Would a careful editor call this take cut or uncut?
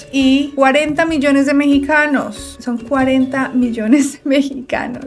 uncut